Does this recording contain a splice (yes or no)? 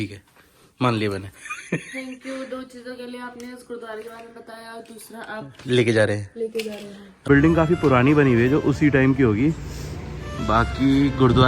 yes